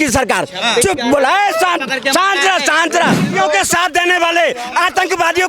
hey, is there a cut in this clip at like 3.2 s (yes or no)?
yes